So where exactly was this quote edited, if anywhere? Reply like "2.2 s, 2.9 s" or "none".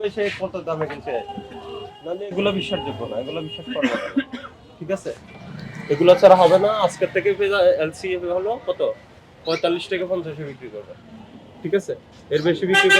none